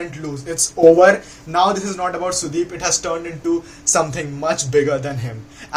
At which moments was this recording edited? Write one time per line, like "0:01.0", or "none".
none